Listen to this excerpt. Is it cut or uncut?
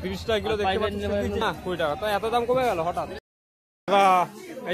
cut